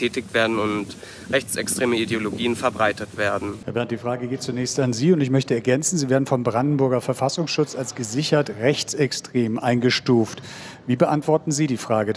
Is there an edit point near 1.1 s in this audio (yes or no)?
no